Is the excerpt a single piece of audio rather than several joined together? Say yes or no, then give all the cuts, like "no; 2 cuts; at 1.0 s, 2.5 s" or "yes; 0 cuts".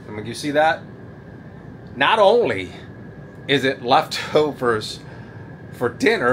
yes; 0 cuts